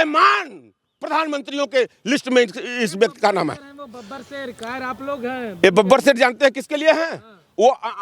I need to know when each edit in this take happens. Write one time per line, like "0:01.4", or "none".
none